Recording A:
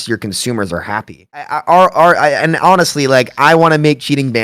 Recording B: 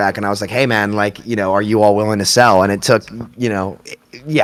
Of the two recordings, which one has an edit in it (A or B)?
A